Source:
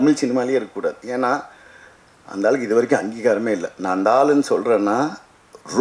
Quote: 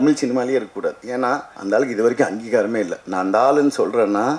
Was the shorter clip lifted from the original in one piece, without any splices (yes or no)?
no